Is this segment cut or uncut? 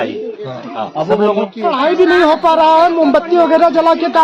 uncut